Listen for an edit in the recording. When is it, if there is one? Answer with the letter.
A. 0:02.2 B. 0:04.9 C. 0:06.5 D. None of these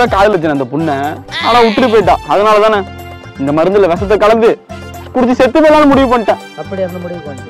D